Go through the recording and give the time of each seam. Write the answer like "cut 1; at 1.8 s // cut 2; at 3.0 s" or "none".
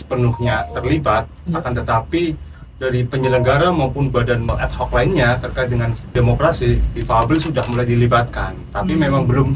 cut 1; at 4.5 s // cut 2; at 6.0 s